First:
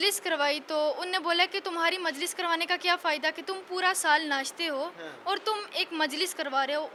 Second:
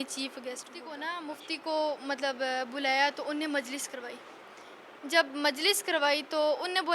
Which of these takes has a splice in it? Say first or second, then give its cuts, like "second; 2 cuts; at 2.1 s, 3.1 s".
second; 1 cut; at 1.0 s